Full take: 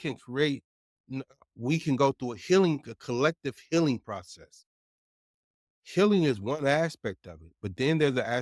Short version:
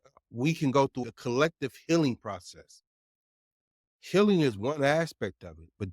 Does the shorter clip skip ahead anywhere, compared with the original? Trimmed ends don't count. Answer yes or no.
yes